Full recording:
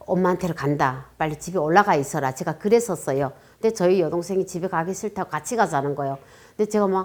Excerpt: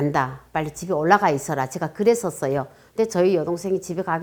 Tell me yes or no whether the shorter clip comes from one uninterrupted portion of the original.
yes